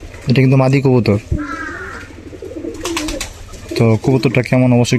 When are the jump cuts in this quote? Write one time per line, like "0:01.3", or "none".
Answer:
none